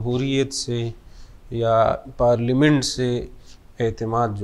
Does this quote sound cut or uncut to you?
uncut